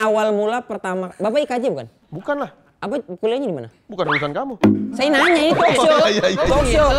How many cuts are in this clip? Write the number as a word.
zero